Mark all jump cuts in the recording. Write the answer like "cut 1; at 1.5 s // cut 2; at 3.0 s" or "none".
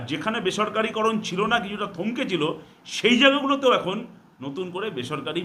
none